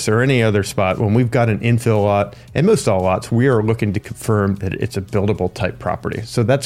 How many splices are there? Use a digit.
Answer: 0